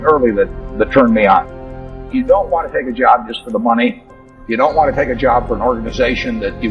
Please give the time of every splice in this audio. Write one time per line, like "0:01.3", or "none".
0:01.5